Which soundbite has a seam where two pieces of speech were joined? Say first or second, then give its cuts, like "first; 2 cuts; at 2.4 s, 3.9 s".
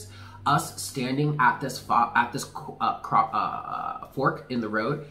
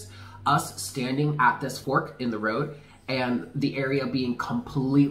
second; 1 cut; at 1.8 s